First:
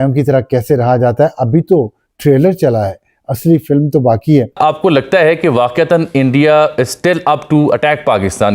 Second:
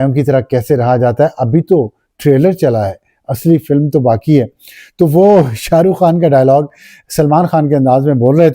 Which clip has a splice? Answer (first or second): first